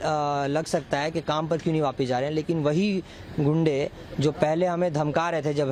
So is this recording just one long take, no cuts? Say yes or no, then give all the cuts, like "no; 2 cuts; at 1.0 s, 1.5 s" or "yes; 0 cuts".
yes; 0 cuts